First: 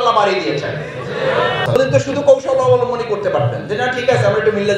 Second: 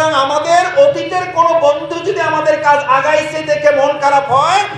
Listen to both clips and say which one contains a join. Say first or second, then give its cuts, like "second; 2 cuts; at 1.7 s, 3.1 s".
first; 1 cut; at 1.8 s